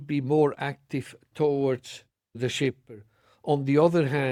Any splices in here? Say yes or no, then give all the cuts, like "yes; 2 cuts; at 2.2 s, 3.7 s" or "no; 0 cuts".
no; 0 cuts